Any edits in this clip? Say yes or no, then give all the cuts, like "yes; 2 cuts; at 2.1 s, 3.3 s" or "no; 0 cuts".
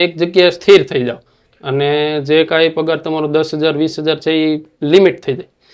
no; 0 cuts